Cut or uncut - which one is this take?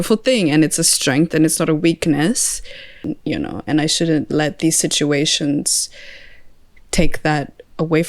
cut